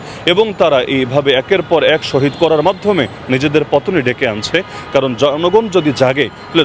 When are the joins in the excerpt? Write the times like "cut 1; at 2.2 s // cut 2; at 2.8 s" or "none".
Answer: none